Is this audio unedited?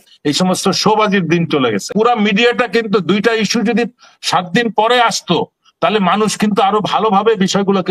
no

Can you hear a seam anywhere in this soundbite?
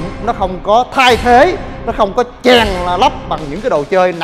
no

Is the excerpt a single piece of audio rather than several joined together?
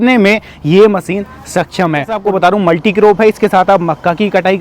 no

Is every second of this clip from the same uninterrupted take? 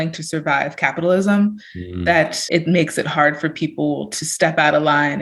no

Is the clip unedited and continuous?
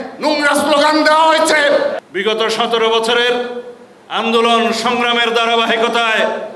no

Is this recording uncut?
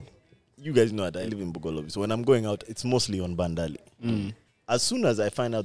no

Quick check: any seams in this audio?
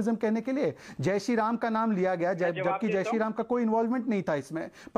no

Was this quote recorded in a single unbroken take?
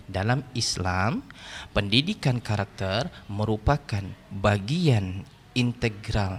yes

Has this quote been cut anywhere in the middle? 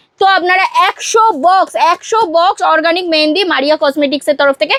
no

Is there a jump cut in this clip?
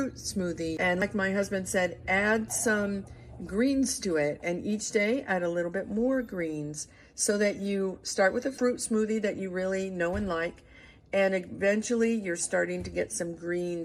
yes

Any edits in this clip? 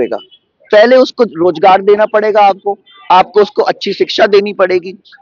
no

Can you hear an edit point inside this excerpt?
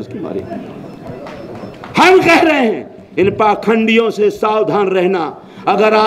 no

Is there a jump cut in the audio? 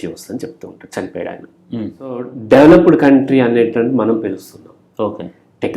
yes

